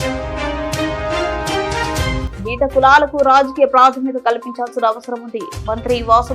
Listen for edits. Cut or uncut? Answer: cut